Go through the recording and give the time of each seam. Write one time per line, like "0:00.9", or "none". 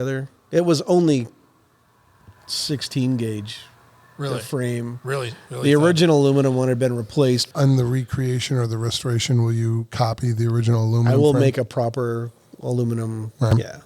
0:07.5